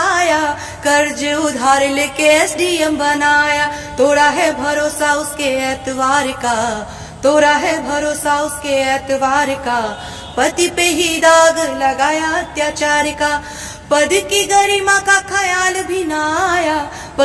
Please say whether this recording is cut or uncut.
uncut